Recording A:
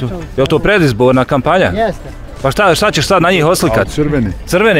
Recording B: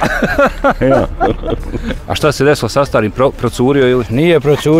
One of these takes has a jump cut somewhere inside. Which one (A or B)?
B